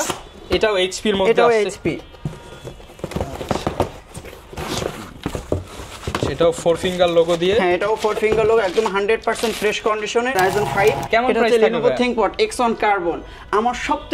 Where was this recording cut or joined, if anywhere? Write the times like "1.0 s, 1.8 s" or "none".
10.4 s